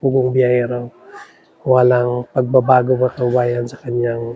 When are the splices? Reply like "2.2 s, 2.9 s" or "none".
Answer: none

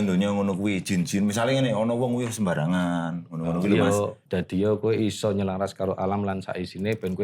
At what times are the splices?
4.2 s

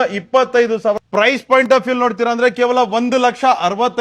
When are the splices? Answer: 1.0 s

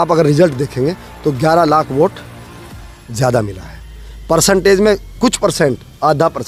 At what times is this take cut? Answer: none

